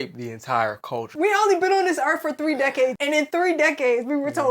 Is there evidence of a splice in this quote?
yes; 2 cuts; at 1.1 s, 3.0 s

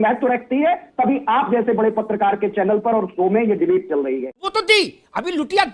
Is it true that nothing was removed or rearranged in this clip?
no; 1 cut; at 4.4 s

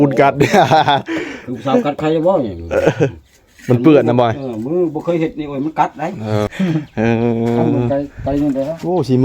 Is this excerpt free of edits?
no; 1 cut; at 6.5 s

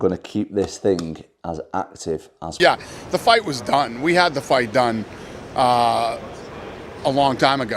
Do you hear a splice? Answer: yes; 1 cut; at 2.6 s

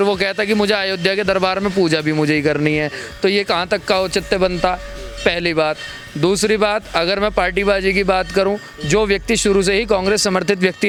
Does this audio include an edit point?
no; 0 cuts

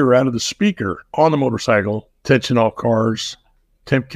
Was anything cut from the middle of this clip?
yes; 2 cuts; at 1.0 s, 2.1 s

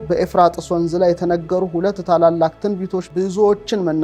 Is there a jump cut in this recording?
yes; 1 cut; at 3.1 s

